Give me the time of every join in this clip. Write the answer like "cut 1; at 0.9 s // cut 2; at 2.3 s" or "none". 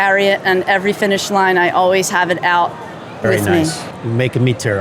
cut 1; at 3.9 s